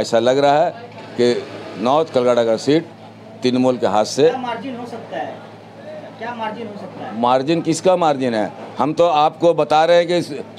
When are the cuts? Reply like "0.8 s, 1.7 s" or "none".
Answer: none